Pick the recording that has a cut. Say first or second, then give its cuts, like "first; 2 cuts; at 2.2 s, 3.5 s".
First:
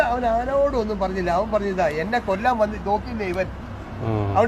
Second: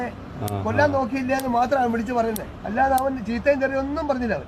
second; 1 cut; at 2.5 s